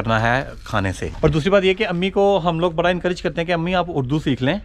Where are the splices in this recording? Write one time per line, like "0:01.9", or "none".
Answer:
0:01.1